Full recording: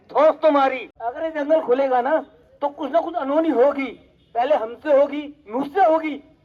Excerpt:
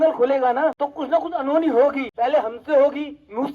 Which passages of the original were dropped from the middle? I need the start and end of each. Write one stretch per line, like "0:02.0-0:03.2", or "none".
0:02.3-0:02.7
0:03.9-0:04.2